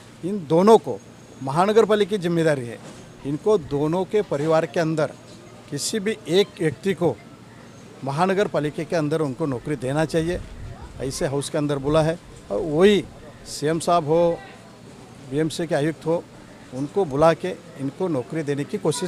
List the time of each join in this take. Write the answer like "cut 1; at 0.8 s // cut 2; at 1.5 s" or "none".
none